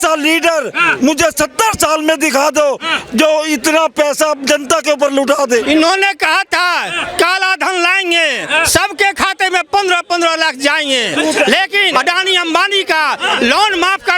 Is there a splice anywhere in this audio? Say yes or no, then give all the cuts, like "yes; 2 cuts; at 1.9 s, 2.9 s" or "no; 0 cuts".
yes; 2 cuts; at 5.6 s, 11.9 s